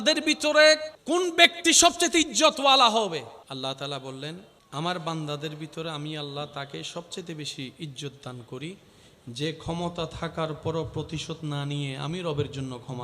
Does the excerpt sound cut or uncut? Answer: cut